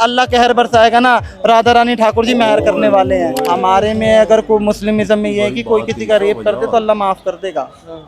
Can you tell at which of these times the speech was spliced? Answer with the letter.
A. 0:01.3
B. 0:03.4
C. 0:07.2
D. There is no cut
B